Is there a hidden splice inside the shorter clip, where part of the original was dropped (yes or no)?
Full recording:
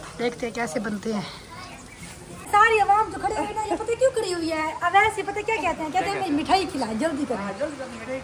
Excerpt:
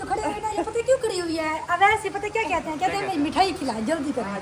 no